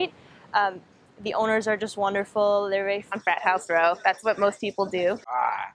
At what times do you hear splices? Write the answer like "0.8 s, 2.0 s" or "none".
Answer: none